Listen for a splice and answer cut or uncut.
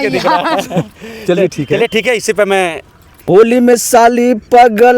cut